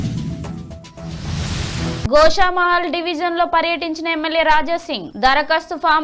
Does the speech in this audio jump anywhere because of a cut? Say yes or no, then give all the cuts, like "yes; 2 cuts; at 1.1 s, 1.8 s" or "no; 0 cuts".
yes; 1 cut; at 2.0 s